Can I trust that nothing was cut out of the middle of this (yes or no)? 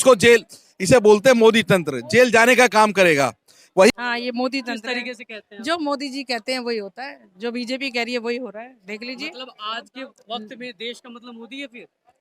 no